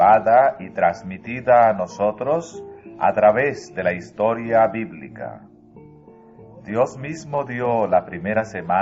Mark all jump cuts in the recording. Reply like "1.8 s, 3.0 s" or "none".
4.7 s